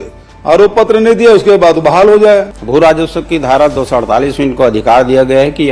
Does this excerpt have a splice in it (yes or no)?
yes